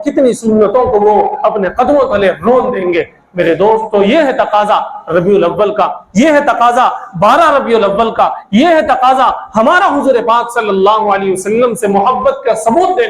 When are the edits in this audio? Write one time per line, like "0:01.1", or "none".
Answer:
none